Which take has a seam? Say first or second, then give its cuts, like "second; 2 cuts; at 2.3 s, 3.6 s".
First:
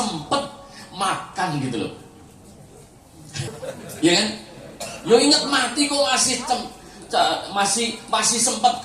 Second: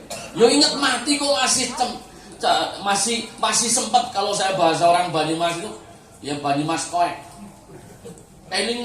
first; 1 cut; at 3.5 s